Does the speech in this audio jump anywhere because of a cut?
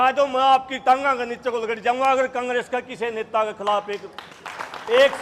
no; 0 cuts

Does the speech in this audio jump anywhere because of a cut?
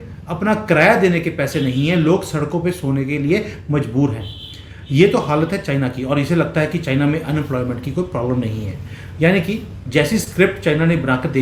no; 0 cuts

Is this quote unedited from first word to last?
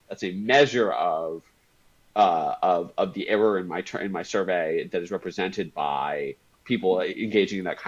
yes; 0 cuts

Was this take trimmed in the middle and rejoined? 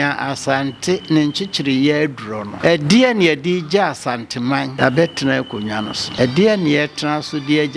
yes; 3 cuts; at 2.5 s, 4.7 s, 6.0 s

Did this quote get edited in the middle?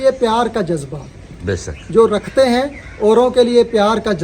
no; 0 cuts

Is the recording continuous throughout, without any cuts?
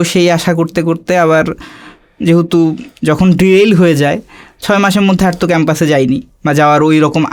yes; 0 cuts

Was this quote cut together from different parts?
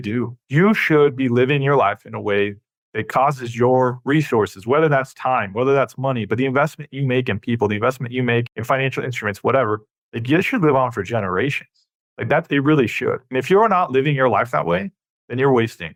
no; 0 cuts

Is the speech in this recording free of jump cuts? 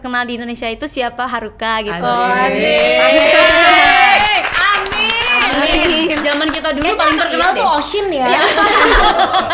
yes; 0 cuts

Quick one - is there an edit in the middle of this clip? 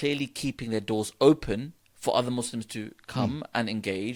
no; 0 cuts

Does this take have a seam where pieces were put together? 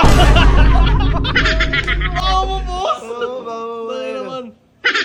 no; 0 cuts

